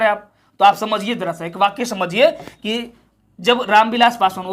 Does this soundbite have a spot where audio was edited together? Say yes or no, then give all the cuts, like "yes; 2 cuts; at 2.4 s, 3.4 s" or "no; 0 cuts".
no; 0 cuts